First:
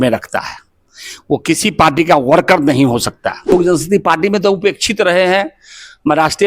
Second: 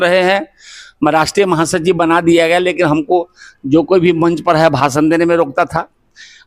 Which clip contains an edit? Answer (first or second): first